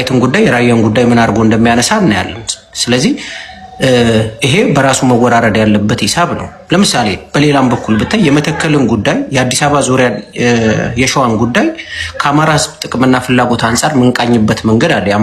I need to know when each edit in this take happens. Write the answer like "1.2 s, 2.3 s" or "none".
none